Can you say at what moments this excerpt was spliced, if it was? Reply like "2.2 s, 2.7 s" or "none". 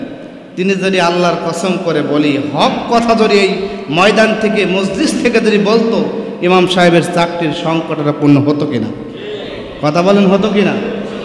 none